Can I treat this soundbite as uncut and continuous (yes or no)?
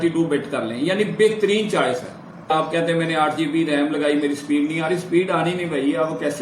no